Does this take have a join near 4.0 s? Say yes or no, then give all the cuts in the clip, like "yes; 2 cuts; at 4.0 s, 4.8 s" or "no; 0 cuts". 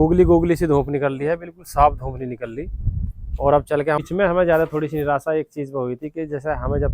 yes; 1 cut; at 4.0 s